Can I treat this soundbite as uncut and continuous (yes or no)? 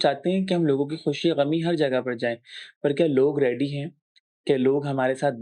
yes